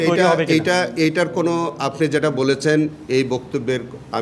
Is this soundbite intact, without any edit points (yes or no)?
yes